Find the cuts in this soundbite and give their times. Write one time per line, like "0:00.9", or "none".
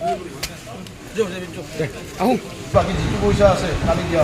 0:02.7